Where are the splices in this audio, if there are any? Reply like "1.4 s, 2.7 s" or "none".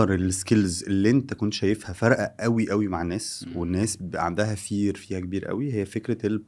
none

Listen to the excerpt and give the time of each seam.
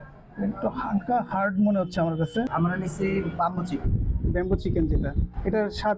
2.5 s

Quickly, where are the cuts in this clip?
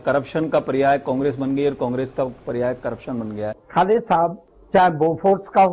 3.6 s, 4.5 s

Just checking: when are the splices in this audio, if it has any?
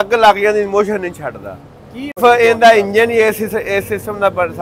2.2 s

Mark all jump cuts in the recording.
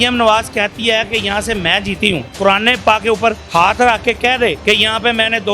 2.3 s, 3.4 s, 4.6 s

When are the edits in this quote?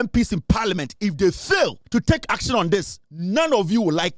1.8 s

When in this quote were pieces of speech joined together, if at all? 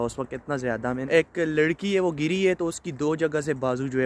1.0 s

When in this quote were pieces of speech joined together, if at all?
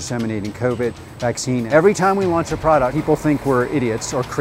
1.7 s, 3.0 s

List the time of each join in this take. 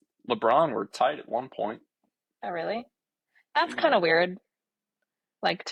none

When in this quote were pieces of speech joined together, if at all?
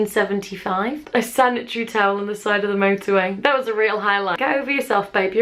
1.0 s, 4.4 s

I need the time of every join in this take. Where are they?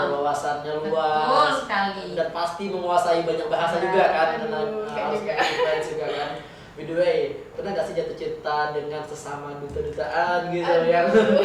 none

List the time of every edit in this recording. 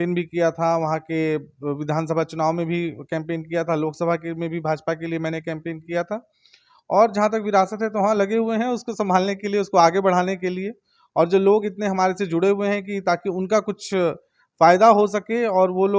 none

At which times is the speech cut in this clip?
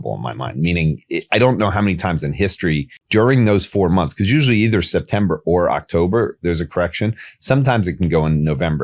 2.9 s

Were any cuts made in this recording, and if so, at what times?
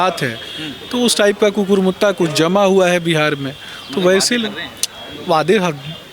none

